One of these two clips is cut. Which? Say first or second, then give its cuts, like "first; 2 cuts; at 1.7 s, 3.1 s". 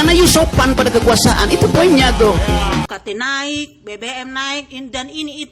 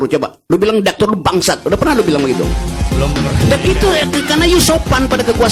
first; 1 cut; at 2.9 s